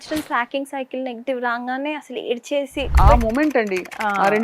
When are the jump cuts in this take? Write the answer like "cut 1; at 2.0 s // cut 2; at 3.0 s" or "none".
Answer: cut 1; at 2.9 s